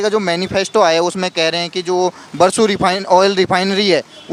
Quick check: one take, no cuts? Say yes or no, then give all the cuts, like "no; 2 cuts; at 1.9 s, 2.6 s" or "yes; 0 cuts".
yes; 0 cuts